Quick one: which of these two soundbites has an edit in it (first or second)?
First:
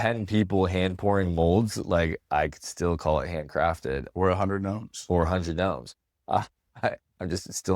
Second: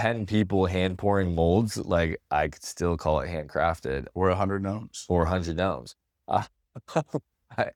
first